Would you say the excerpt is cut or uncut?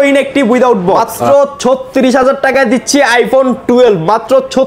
cut